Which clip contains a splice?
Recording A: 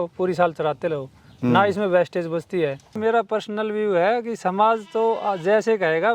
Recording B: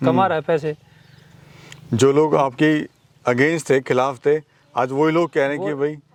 A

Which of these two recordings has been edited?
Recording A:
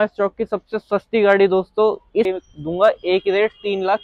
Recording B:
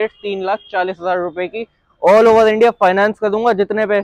A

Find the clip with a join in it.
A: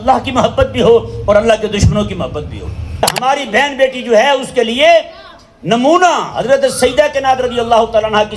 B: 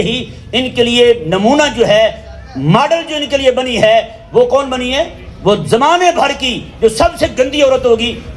A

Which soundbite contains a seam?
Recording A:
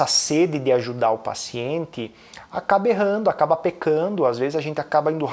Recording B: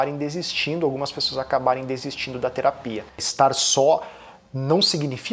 B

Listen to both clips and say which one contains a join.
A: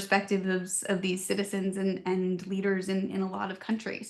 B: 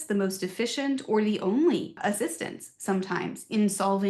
B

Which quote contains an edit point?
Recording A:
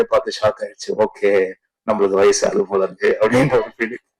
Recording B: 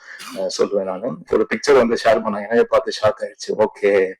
B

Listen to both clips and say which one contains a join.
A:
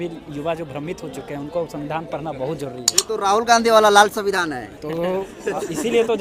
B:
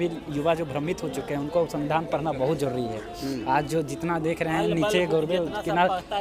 A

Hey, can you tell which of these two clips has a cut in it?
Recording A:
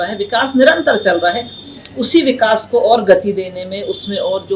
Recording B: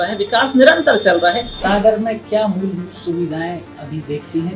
B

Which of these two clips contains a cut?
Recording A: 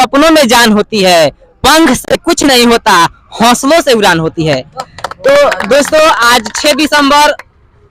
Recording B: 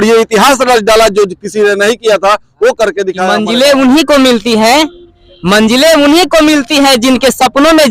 B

